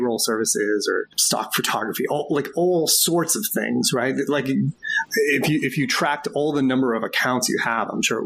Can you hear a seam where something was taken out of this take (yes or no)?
yes